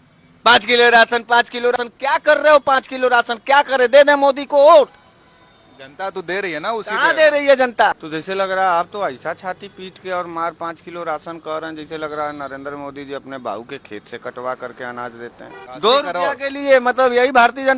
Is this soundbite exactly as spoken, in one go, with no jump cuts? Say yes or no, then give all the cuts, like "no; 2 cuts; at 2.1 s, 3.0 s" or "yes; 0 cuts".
no; 3 cuts; at 1.8 s, 8.0 s, 15.6 s